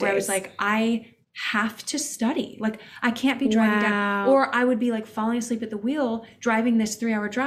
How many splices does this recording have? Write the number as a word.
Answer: zero